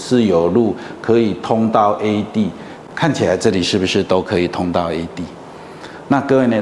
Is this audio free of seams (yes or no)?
yes